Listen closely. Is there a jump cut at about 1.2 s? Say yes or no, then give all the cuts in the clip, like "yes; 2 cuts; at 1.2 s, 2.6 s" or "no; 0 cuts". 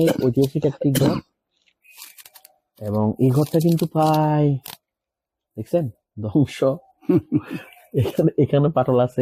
no; 0 cuts